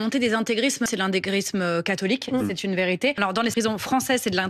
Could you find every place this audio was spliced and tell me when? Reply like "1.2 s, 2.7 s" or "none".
0.9 s, 3.4 s